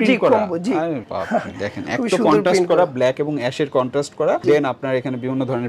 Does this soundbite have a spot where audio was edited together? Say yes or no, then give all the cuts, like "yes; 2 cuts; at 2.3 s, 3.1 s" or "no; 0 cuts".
no; 0 cuts